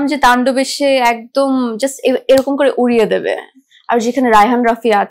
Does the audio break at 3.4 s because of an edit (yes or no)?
no